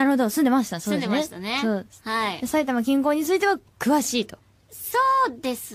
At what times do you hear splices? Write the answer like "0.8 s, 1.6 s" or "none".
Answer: 2.0 s